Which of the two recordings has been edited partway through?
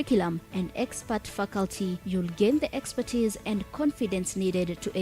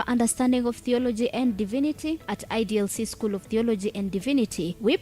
second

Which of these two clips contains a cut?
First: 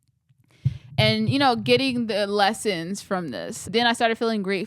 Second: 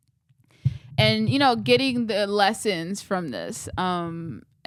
first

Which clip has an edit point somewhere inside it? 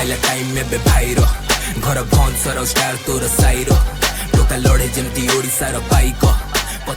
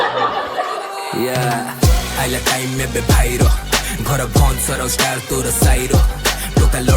second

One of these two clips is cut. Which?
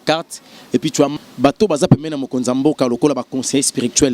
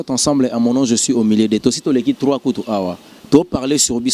first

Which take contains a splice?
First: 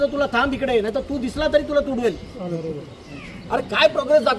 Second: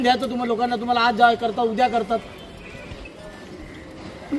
first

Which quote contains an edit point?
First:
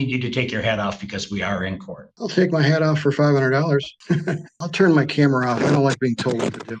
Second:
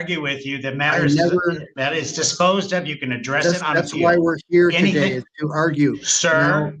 first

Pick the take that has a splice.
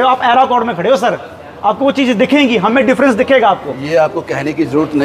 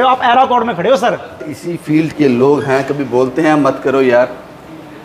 second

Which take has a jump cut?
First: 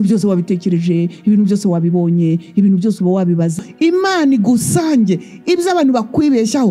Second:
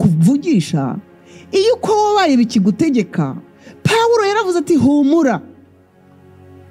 first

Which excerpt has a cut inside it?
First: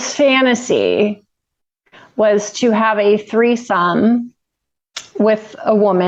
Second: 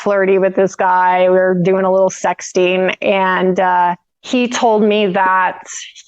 second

